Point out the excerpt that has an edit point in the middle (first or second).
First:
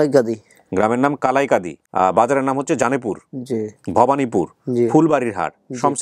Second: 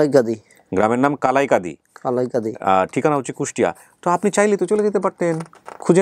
first